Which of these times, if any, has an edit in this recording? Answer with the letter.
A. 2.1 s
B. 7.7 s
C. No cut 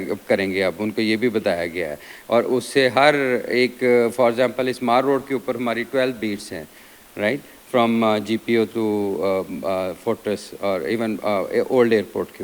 C